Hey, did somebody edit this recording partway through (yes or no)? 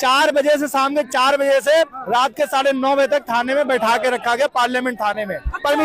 no